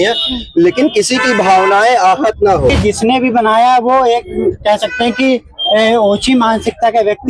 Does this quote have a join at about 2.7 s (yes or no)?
yes